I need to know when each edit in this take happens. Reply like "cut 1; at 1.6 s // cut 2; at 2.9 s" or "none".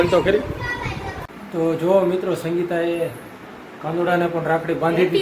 cut 1; at 1.3 s